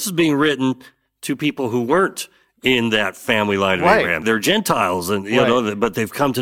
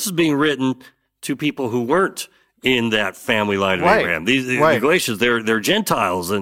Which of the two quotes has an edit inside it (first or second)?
first